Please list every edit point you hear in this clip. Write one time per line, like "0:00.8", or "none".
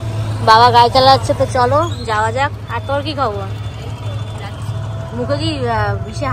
none